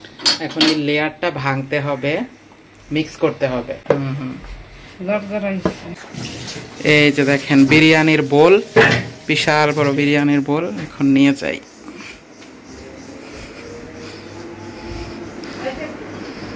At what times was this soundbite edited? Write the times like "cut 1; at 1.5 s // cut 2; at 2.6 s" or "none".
cut 1; at 3.8 s // cut 2; at 5.6 s